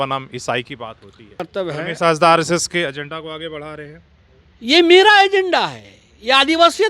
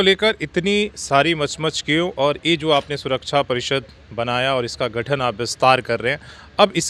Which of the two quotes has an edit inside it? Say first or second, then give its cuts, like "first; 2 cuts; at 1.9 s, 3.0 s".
first; 1 cut; at 1.4 s